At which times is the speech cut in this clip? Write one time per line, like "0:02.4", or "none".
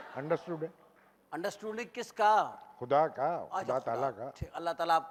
none